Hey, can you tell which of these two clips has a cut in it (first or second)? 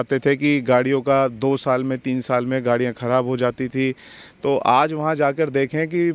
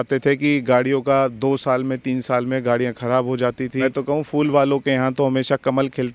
second